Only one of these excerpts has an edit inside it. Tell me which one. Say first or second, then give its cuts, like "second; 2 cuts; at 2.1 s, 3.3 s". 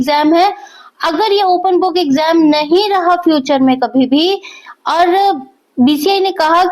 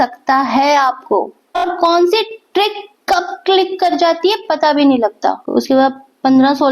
second; 2 cuts; at 1.4 s, 5.4 s